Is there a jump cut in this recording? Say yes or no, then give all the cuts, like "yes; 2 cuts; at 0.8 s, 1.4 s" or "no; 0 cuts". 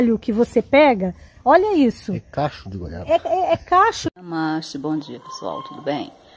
no; 0 cuts